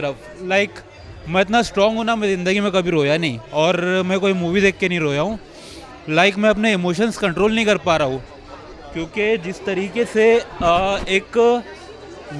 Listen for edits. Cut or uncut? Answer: uncut